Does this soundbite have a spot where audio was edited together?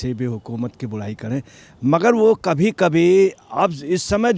no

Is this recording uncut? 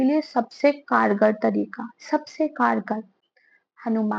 yes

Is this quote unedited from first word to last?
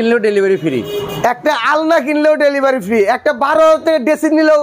yes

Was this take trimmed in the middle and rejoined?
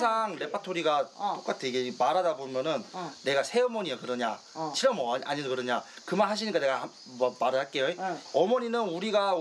no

